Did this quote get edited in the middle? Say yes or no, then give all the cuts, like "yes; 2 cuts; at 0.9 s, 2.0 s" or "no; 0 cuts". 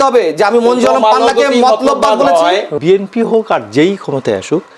yes; 1 cut; at 2.7 s